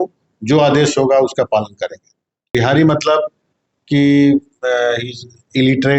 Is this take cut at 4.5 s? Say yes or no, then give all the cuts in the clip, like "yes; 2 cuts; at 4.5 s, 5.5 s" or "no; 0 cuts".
no; 1 cut; at 2.4 s